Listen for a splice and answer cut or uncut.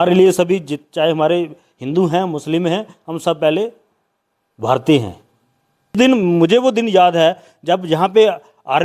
cut